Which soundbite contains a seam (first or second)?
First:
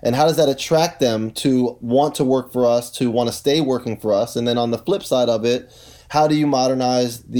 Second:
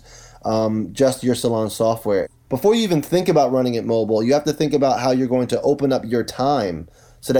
second